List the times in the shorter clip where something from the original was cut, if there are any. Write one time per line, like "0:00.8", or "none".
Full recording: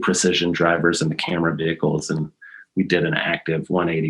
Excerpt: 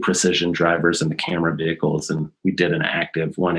0:02.3